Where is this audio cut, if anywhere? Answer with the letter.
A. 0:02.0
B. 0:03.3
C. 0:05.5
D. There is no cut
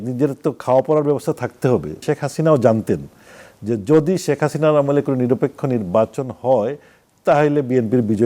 A